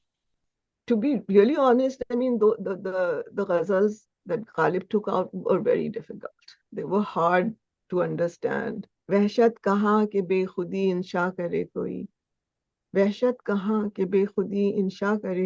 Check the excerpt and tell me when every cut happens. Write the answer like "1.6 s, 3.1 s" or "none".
8.9 s